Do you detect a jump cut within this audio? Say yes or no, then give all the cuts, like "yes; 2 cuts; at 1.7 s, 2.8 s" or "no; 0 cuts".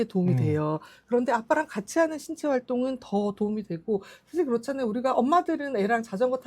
no; 0 cuts